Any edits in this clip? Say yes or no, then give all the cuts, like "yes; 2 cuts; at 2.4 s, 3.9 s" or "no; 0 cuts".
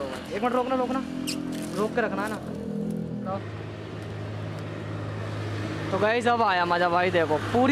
no; 0 cuts